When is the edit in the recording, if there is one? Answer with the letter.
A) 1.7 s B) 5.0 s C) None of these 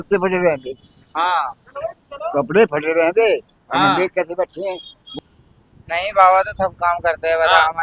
B